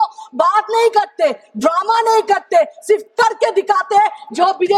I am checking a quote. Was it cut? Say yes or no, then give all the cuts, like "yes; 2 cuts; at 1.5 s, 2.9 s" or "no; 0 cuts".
no; 0 cuts